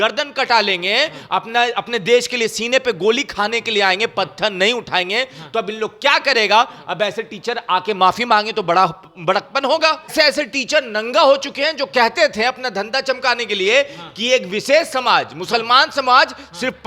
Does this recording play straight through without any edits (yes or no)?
no